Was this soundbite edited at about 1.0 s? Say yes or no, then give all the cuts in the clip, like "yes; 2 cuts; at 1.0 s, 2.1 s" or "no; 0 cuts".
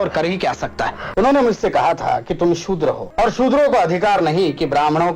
yes; 2 cuts; at 1.0 s, 3.1 s